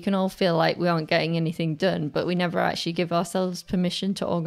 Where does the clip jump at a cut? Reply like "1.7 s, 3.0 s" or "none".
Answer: none